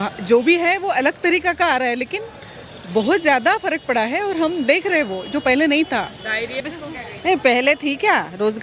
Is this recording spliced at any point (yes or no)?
yes